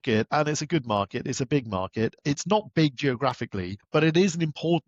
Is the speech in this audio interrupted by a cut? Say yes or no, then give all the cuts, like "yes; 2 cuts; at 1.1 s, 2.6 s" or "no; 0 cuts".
yes; 2 cuts; at 2.2 s, 3.7 s